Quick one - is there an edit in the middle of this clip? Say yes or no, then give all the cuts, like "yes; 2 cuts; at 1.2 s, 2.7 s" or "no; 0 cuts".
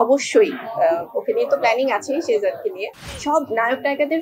yes; 1 cut; at 3.1 s